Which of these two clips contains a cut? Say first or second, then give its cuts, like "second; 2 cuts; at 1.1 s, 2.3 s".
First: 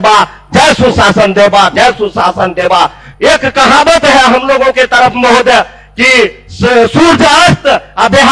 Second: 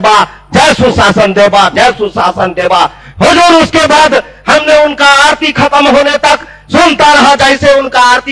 first; 1 cut; at 3.1 s